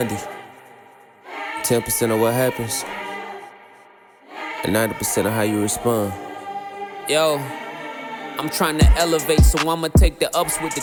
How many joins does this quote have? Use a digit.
0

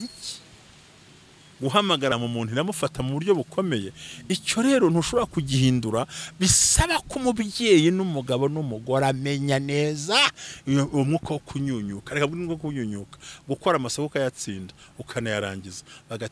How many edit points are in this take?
1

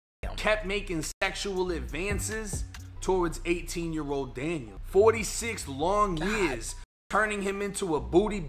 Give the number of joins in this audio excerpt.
1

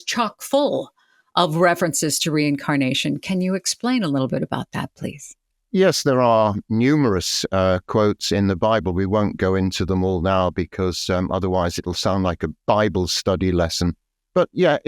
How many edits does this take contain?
0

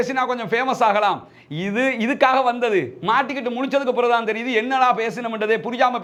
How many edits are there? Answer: 0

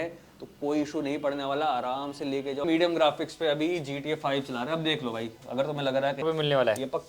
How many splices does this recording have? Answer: 2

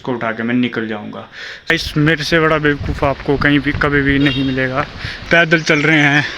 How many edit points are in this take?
2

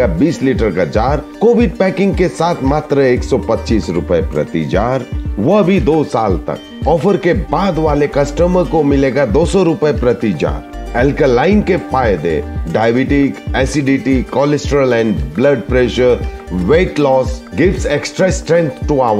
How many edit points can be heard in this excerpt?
0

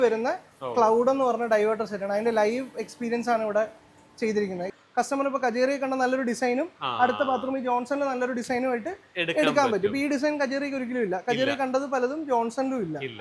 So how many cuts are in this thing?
1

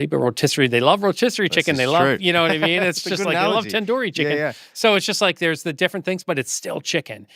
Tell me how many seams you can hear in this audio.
0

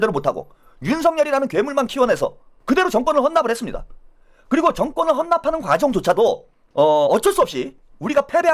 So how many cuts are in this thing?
0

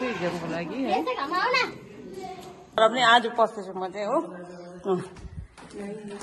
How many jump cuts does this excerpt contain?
1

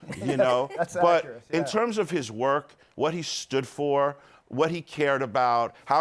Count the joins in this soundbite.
1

